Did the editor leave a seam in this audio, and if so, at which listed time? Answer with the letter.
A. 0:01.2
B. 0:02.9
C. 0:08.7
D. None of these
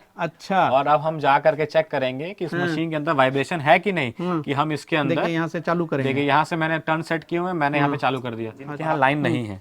C